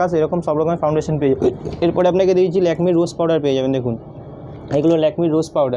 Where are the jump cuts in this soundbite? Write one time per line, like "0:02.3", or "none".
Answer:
none